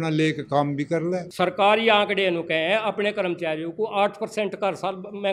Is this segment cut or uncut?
cut